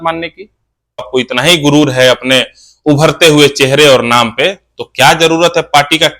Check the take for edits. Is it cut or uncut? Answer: cut